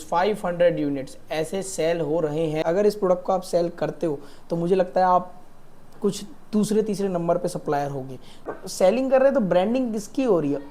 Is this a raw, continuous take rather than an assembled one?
no; 2 cuts; at 2.6 s, 8.5 s

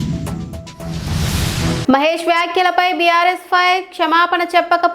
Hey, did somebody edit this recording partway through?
yes; 1 cut; at 1.8 s

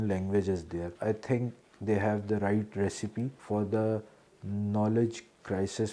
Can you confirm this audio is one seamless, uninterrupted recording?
no; 2 cuts; at 0.9 s, 3.4 s

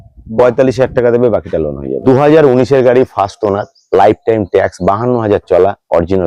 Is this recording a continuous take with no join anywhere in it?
no; 1 cut; at 1.9 s

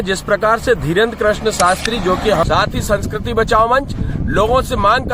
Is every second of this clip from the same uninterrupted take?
no; 1 cut; at 2.5 s

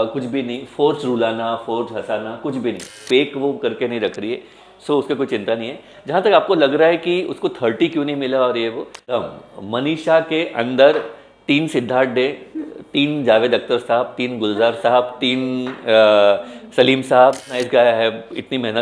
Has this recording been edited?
yes; 3 cuts; at 3.0 s, 9.0 s, 17.5 s

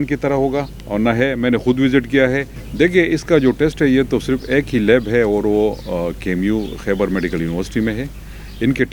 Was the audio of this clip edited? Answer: no; 0 cuts

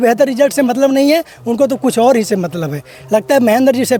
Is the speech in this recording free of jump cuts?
yes; 0 cuts

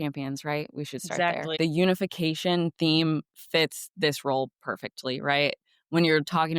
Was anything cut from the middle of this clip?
yes; 1 cut; at 1.6 s

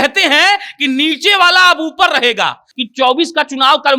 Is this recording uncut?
no; 1 cut; at 2.7 s

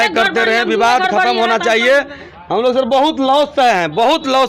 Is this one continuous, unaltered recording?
yes; 0 cuts

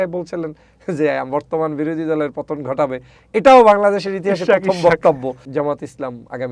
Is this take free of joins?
no; 1 cut; at 5.4 s

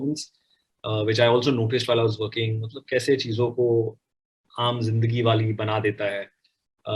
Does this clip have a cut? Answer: no; 0 cuts

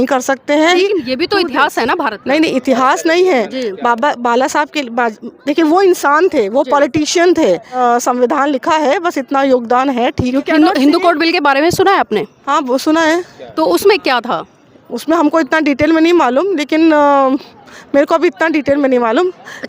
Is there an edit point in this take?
yes; 3 cuts; at 0.7 s, 7.8 s, 10.3 s

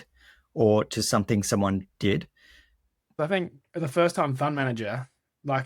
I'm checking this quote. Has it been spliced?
yes; 1 cut; at 3.1 s

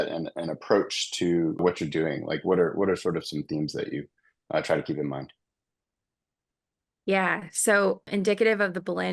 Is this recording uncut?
yes; 0 cuts

